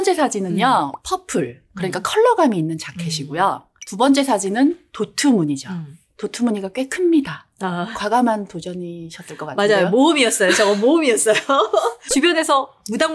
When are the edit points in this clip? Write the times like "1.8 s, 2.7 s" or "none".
none